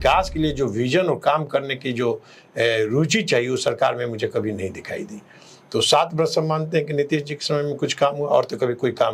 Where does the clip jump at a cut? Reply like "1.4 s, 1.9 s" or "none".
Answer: none